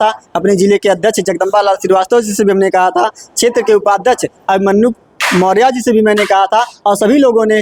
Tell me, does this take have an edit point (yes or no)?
no